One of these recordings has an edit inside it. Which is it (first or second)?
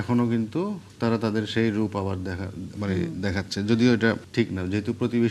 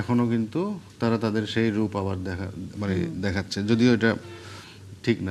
first